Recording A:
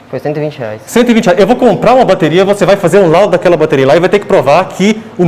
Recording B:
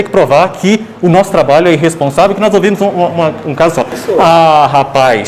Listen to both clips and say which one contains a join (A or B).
B